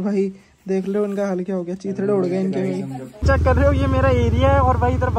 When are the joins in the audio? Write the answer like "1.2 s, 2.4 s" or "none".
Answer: 3.2 s